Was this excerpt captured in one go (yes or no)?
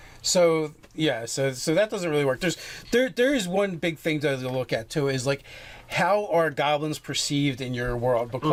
yes